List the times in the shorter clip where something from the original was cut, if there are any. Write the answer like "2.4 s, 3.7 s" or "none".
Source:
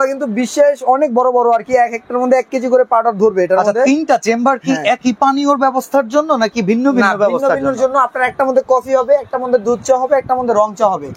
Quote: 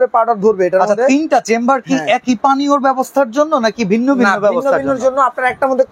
none